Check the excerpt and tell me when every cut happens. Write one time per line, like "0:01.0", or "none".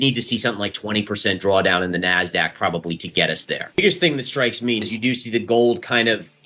0:03.8
0:04.9